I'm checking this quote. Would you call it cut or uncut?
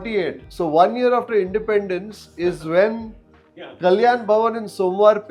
uncut